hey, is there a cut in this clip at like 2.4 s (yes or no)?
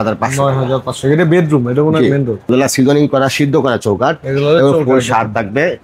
yes